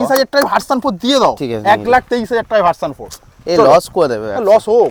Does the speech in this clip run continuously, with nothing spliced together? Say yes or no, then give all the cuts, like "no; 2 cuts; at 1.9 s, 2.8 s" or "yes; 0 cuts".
yes; 0 cuts